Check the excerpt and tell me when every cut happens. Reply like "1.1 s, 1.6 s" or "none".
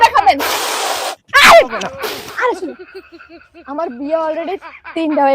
2.0 s